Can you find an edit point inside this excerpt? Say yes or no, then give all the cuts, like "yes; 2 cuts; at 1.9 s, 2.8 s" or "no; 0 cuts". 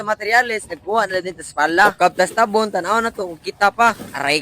no; 0 cuts